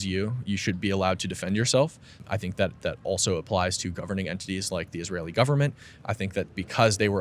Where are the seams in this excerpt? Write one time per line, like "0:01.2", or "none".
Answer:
0:02.2